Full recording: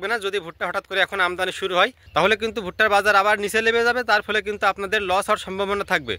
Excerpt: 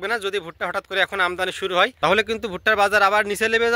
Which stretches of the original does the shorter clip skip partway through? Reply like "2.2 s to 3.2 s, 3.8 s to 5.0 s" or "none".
1.9 s to 2.1 s